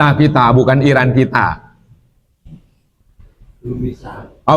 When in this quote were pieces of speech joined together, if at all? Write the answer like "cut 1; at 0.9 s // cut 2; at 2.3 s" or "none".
none